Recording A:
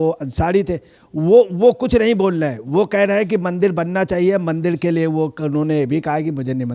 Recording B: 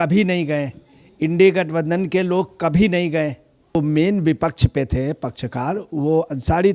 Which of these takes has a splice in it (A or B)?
B